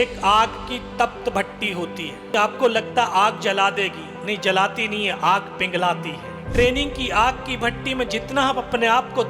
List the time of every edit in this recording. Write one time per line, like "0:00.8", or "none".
0:02.3
0:06.5